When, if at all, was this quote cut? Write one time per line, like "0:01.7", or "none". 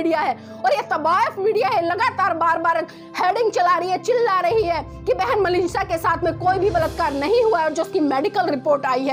none